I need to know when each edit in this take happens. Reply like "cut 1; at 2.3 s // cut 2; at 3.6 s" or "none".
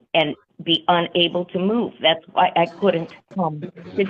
cut 1; at 3.2 s